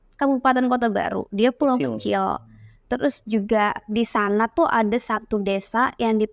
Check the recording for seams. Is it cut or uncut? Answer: uncut